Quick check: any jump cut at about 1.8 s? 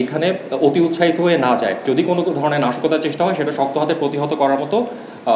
yes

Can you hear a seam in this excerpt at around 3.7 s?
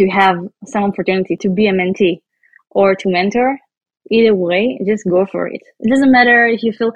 no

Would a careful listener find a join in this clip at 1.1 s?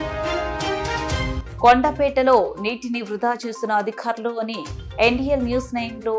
no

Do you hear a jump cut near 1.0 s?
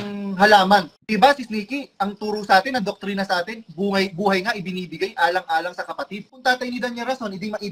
yes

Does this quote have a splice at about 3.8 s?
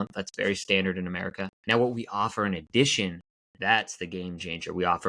no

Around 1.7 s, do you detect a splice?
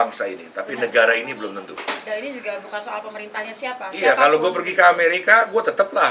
yes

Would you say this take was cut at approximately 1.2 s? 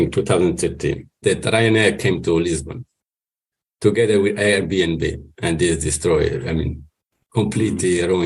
yes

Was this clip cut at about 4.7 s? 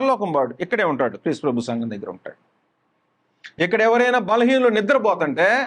no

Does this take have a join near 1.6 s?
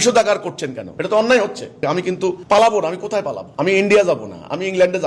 yes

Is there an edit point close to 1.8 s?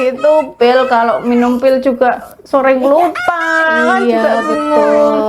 no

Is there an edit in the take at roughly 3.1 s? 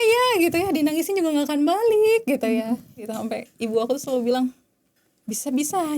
yes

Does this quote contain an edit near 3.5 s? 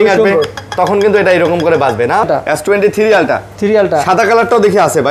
no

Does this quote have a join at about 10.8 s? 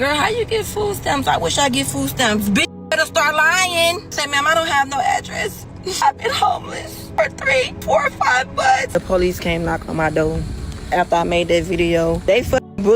no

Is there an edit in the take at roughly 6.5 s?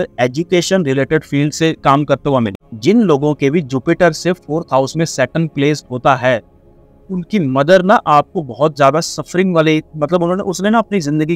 no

